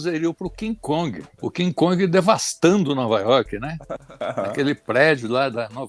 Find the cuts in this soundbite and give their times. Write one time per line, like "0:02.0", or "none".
none